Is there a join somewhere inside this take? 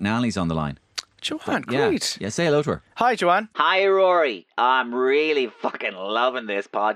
no; 0 cuts

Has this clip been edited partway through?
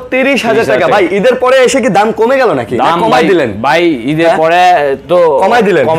no; 0 cuts

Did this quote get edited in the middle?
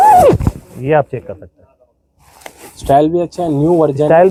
no; 0 cuts

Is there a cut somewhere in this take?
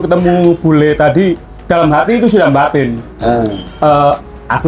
no; 0 cuts

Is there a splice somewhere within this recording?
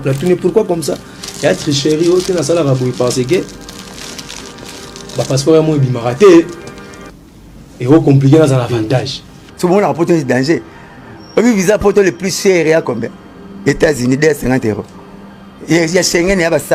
no; 0 cuts

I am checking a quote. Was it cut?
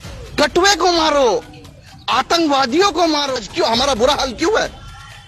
yes; 1 cut; at 3.3 s

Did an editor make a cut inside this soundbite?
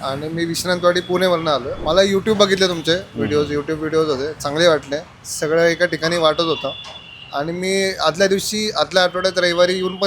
yes; 1 cut; at 1.7 s

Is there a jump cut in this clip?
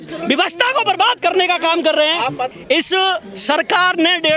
yes; 1 cut; at 2.5 s

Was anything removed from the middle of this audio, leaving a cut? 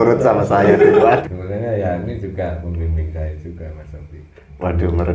yes; 1 cut; at 1.2 s

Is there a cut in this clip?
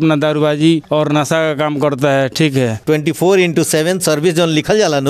yes; 1 cut; at 2.8 s

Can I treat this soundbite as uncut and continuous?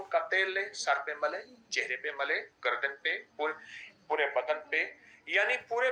yes; 0 cuts

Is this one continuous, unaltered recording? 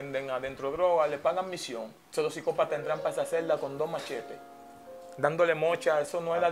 no; 1 cut; at 2.0 s

